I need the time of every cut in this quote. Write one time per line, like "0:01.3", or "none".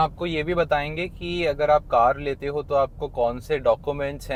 none